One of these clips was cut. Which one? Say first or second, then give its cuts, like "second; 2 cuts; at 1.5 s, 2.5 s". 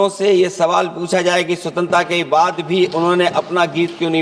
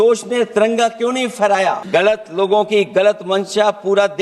second; 1 cut; at 1.8 s